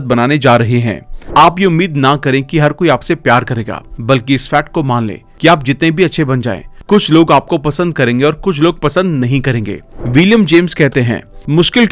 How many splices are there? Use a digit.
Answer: 2